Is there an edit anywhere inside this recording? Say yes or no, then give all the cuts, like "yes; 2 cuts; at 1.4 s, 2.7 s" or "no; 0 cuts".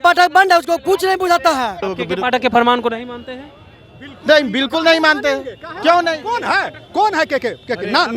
yes; 1 cut; at 1.8 s